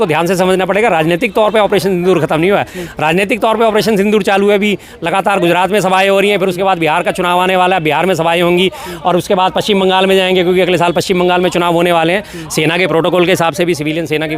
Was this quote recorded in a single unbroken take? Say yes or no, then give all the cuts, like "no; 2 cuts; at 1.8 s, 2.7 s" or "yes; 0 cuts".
no; 1 cut; at 12.3 s